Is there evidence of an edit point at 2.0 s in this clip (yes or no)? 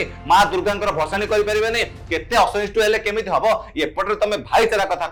no